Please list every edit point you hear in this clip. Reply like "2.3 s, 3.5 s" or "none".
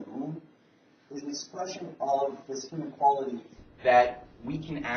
3.5 s